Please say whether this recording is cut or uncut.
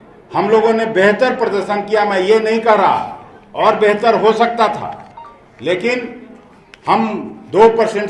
uncut